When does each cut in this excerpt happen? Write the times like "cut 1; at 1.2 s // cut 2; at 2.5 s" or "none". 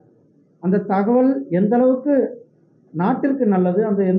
none